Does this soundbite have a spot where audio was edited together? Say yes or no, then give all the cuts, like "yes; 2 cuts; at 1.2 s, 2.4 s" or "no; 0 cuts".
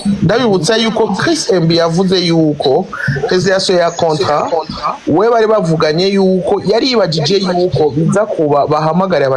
no; 0 cuts